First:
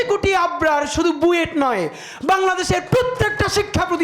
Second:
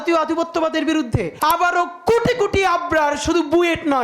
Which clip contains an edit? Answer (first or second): second